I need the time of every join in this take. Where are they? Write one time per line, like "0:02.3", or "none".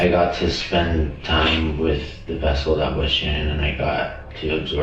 none